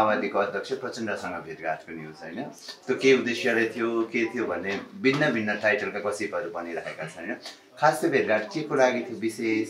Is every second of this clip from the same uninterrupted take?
yes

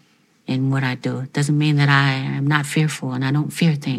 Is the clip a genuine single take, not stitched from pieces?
yes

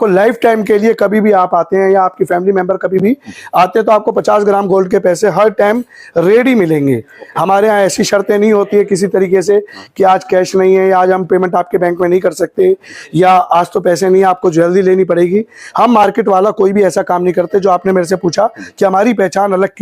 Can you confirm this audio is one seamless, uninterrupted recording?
yes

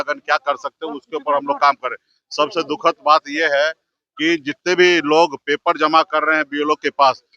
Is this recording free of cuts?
yes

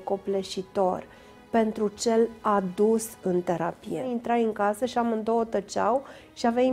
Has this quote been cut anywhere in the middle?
yes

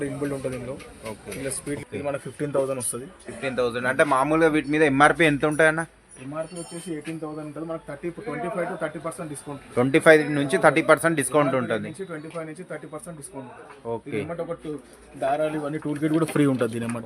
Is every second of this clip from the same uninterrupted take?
no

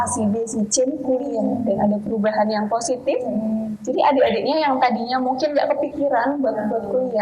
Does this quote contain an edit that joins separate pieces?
no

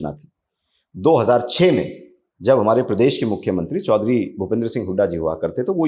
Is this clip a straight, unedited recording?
yes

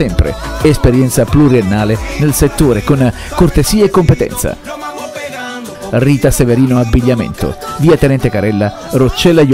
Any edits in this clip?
no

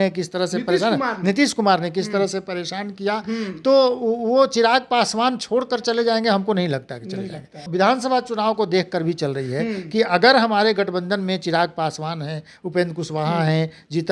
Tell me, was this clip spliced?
yes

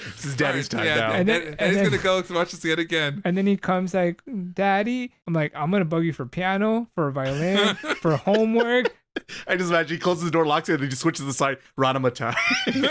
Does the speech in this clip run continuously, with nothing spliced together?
no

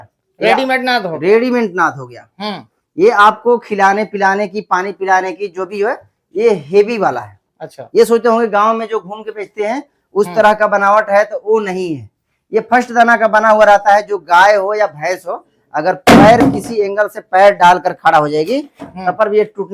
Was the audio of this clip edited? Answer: no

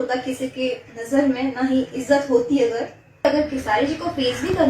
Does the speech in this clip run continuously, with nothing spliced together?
no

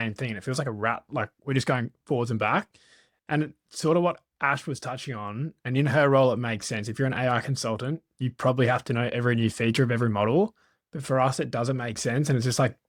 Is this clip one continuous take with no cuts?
yes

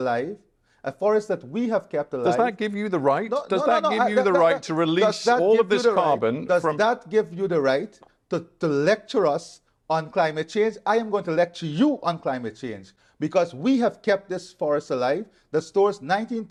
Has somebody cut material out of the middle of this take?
no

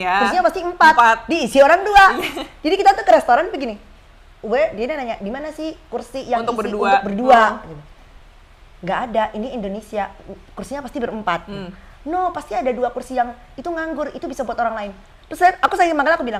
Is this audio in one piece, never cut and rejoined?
yes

